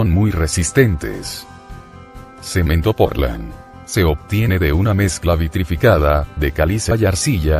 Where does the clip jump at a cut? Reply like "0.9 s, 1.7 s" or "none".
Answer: 2.3 s